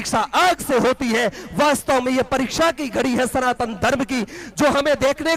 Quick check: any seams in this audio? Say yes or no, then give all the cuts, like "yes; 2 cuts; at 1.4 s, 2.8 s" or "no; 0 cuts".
no; 0 cuts